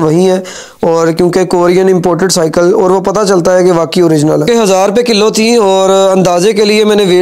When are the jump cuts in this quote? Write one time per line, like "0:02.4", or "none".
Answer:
0:04.5